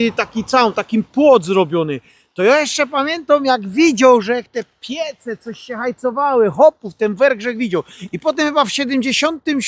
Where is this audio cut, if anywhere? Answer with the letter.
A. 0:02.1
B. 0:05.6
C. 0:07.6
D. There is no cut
D